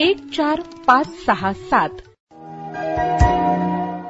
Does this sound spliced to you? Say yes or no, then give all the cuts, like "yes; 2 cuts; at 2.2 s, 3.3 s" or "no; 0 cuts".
yes; 1 cut; at 2.4 s